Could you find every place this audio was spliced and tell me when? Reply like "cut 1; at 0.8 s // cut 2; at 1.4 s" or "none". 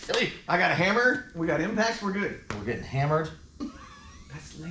none